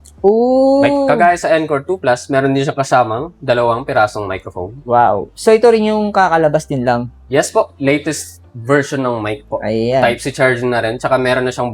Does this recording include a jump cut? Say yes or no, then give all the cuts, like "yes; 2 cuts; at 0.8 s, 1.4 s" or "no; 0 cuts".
no; 0 cuts